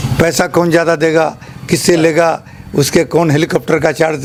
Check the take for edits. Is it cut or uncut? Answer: uncut